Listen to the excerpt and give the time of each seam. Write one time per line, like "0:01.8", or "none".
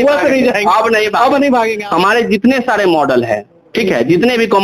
0:01.8

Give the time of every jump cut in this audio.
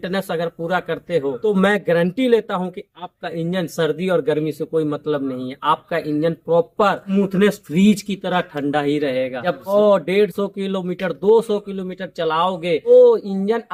none

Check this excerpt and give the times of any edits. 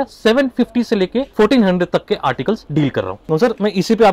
0:02.6

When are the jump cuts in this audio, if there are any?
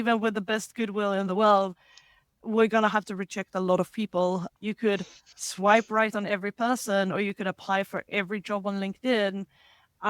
0:04.5

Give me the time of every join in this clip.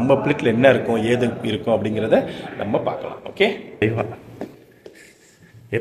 0:03.8

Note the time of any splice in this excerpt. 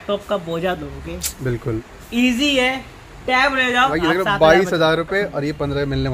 0:03.9

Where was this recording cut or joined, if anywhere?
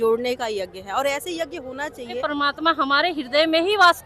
0:02.2

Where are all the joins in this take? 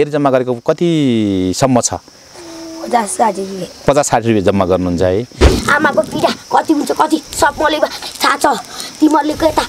0:05.5

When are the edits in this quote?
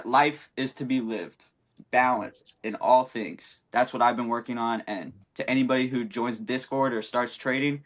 none

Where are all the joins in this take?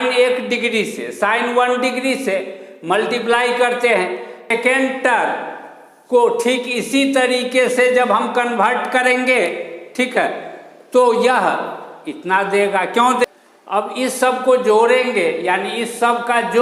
0:04.5
0:13.3

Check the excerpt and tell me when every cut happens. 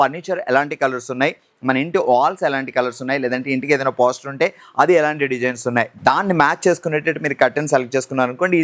none

